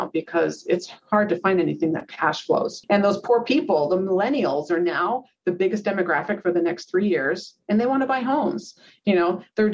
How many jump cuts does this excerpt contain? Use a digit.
1